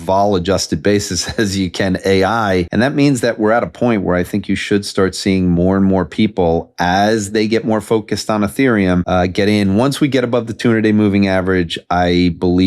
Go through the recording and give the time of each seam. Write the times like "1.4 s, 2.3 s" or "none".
2.7 s, 9.0 s